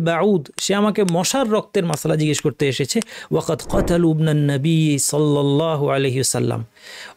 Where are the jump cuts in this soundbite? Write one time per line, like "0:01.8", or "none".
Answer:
none